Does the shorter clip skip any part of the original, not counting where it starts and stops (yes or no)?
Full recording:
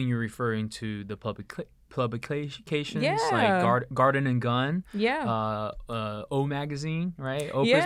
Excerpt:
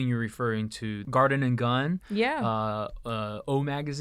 yes